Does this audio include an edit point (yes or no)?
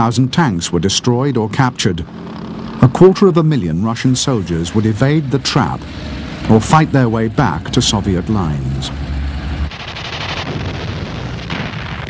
yes